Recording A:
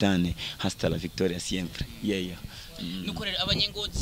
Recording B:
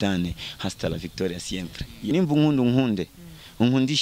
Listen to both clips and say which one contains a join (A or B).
B